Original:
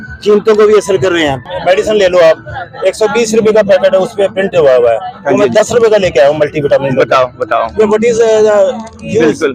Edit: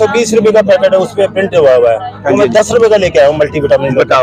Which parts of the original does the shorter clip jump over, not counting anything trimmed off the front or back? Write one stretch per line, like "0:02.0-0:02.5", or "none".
none